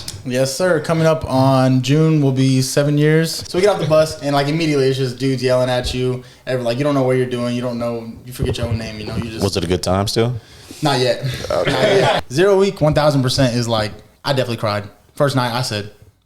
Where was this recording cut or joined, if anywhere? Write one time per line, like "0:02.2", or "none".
0:03.4
0:12.2